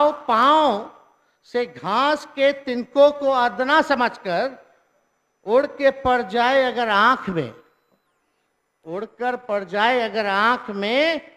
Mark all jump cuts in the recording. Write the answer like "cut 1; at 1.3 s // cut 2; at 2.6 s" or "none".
none